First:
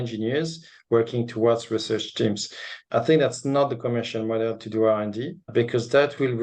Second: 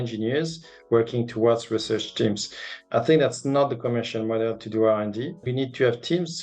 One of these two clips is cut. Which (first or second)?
second